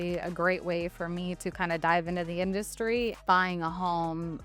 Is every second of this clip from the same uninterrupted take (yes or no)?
no